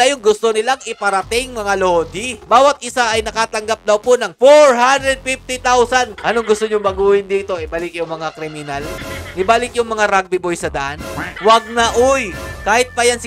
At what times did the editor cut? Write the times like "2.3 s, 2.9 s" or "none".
2.4 s, 6.1 s, 9.0 s, 11.2 s